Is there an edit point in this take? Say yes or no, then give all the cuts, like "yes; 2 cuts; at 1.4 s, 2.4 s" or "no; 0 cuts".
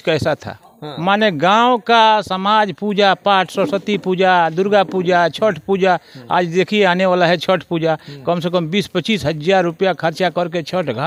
no; 0 cuts